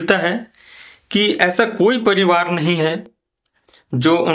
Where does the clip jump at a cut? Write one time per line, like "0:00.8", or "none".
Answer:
none